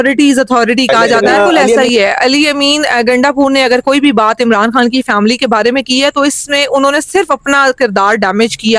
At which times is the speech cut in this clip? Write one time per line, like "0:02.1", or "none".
0:01.8